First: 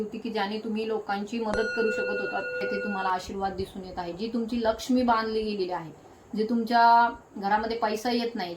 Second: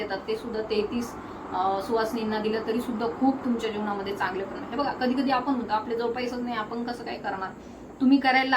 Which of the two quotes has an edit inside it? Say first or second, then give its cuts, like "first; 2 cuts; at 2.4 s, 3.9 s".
first; 1 cut; at 2.7 s